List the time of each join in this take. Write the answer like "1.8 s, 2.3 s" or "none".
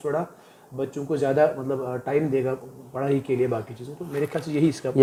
none

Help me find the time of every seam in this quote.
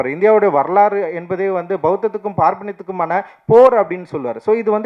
none

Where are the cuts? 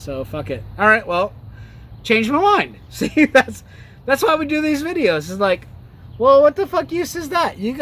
1.1 s

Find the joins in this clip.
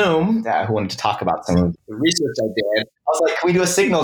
1.7 s, 3.0 s

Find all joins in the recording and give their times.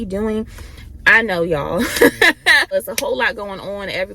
2.7 s

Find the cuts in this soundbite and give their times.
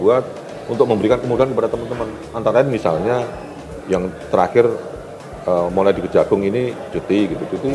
none

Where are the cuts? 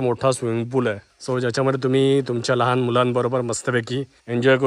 none

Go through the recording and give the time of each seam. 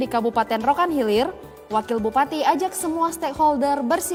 none

